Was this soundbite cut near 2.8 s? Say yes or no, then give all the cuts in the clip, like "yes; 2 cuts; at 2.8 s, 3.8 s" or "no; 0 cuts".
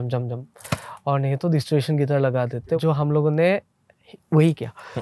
yes; 1 cut; at 2.8 s